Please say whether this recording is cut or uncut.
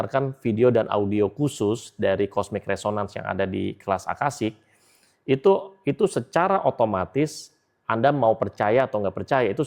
uncut